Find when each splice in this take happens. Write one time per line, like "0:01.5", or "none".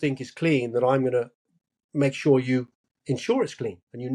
none